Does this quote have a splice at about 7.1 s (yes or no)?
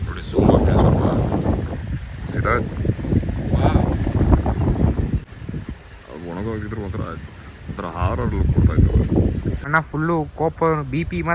no